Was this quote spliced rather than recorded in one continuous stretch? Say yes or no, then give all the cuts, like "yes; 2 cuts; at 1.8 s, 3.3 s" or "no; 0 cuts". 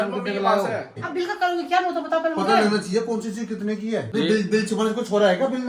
yes; 2 cuts; at 1.0 s, 4.1 s